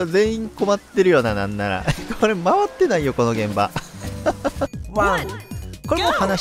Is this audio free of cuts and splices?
no; 1 cut; at 4.7 s

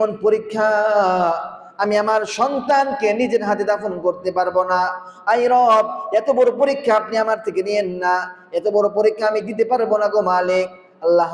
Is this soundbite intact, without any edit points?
yes; 0 cuts

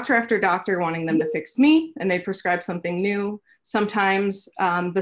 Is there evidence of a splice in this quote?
no; 0 cuts

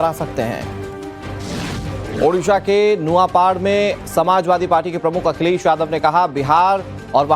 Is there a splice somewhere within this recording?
yes; 1 cut; at 3.9 s

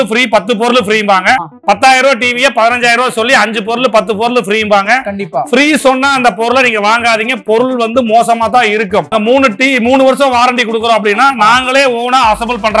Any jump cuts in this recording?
yes; 2 cuts; at 1.5 s, 9.1 s

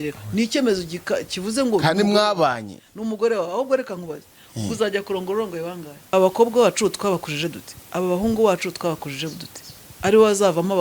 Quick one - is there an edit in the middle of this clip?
yes; 1 cut; at 5.9 s

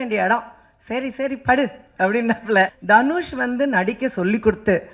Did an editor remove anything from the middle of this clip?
yes; 1 cut; at 2.8 s

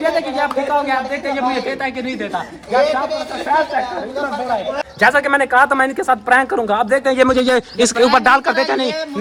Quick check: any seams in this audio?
no; 0 cuts

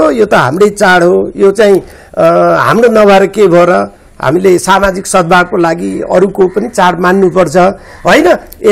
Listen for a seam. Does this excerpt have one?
no; 0 cuts

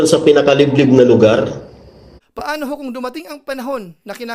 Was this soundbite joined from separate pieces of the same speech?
yes; 1 cut; at 2.2 s

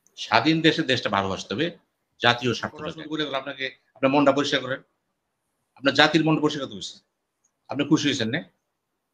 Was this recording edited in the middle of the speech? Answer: yes; 1 cut; at 3.1 s

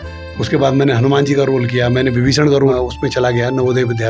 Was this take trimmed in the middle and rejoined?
yes; 1 cut; at 2.8 s

